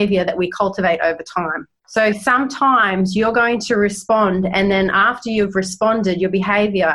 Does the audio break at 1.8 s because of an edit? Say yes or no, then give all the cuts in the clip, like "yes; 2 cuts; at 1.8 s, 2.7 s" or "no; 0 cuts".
yes; 1 cut; at 1.8 s